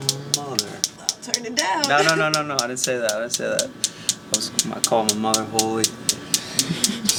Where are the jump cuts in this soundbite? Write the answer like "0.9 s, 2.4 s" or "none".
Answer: none